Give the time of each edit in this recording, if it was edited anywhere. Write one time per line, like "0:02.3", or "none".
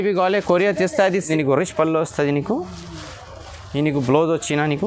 0:01.3